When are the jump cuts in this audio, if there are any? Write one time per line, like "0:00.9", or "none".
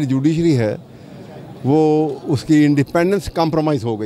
none